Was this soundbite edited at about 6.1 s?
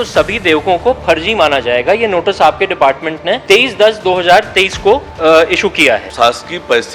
yes; 3 cuts; at 3.4 s, 5.1 s, 6.1 s

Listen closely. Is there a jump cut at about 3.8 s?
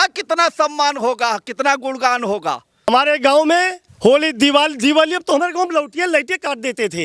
yes; 2 cuts; at 2.9 s, 3.8 s

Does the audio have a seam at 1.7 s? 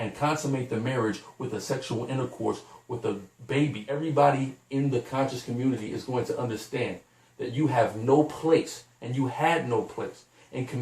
no; 1 cut; at 3.9 s

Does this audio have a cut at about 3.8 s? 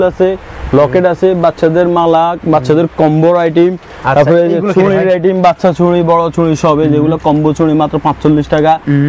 no; 0 cuts

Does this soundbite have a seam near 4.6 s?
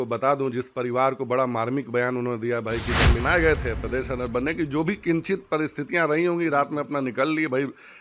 no; 1 cut; at 3.2 s

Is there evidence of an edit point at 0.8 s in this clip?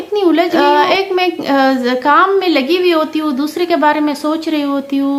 no; 0 cuts

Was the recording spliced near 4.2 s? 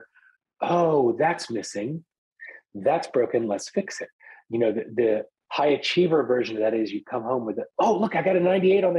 no; 1 cut; at 2.3 s

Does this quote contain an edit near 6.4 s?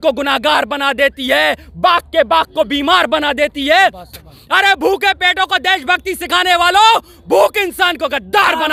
no; 0 cuts

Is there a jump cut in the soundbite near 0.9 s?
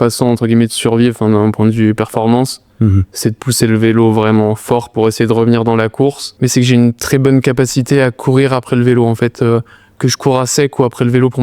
no; 1 cut; at 6.3 s

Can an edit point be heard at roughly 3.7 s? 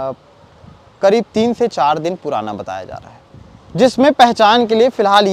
yes; 1 cut; at 3.7 s

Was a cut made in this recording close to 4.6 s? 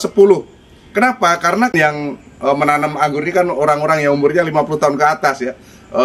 no; 1 cut; at 1.7 s

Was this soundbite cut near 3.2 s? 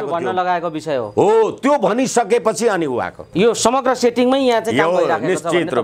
yes; 1 cut; at 3.2 s

